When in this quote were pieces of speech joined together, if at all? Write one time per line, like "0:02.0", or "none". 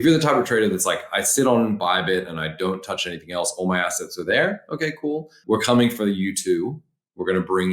0:05.4

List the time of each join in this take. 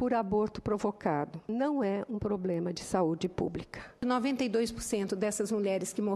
0:01.5
0:04.0

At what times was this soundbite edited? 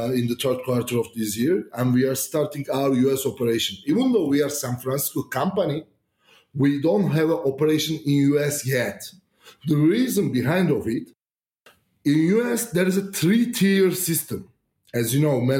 none

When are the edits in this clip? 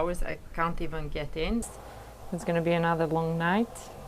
0:01.8

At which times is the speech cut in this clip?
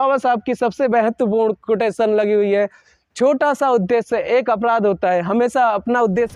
none

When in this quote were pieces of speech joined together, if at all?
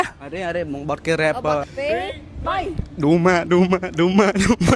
0:01.7

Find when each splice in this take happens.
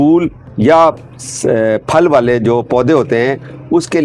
none

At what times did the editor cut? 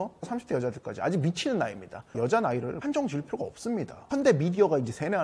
0:02.2
0:04.0

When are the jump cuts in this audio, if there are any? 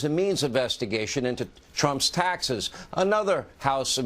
0:01.6
0:02.4

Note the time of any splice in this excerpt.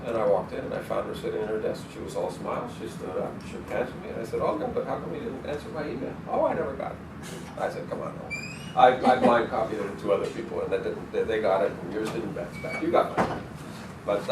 0:06.2

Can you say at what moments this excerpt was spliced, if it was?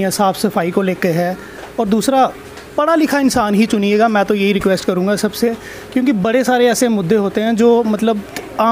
none

